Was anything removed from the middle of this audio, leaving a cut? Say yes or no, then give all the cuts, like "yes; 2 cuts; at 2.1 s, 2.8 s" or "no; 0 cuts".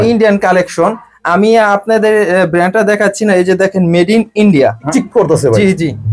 yes; 1 cut; at 4.9 s